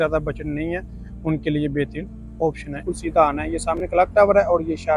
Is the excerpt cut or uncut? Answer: cut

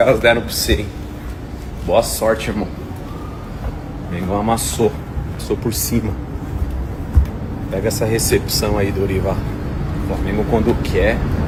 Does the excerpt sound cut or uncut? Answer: uncut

